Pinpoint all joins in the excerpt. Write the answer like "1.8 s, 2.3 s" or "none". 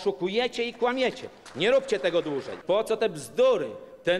2.5 s